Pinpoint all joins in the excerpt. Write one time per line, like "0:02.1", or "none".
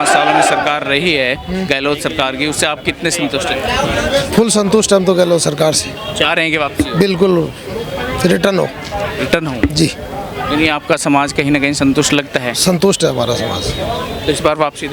none